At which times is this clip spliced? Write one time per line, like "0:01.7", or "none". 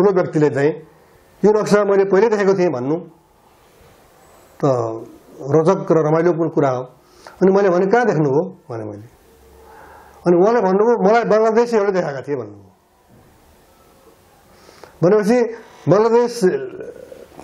none